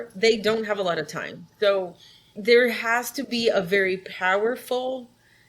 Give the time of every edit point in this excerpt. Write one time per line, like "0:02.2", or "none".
0:02.4